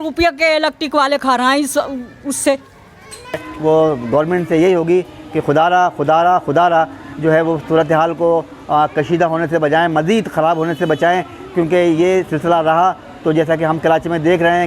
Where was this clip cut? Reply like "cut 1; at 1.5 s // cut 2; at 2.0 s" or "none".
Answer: cut 1; at 3.5 s